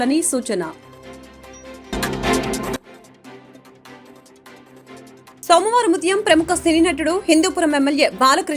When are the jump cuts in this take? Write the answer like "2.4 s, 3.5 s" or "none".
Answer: 1.9 s, 5.4 s